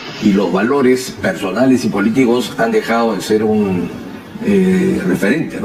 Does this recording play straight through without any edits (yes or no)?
yes